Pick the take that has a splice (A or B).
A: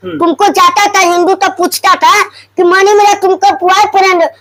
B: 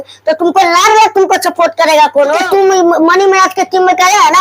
B